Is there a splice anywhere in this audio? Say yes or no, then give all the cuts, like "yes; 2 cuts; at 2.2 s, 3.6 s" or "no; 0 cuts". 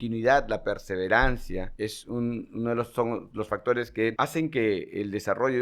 yes; 2 cuts; at 1.7 s, 4.1 s